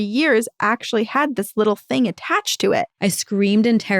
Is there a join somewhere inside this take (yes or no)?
yes